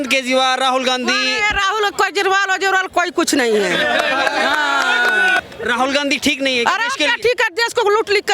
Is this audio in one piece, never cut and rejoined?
no; 1 cut; at 5.4 s

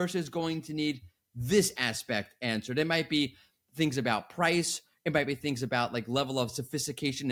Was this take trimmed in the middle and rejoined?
no; 0 cuts

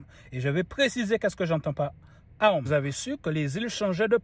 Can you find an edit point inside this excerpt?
yes; 1 cut; at 2.7 s

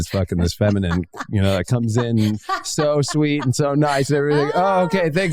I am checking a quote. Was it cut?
no; 0 cuts

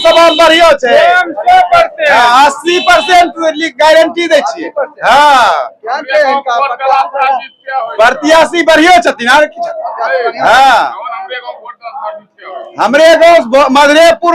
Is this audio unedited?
yes; 0 cuts

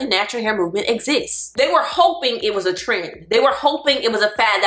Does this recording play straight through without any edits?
no; 1 cut; at 1.5 s

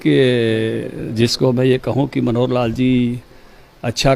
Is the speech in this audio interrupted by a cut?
no; 0 cuts

